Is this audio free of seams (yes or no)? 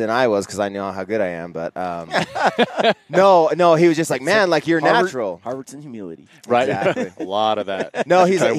yes